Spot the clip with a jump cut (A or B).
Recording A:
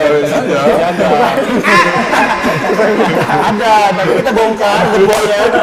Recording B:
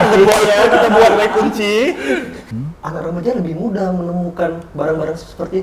B